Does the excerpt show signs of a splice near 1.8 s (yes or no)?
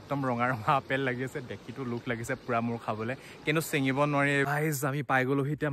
no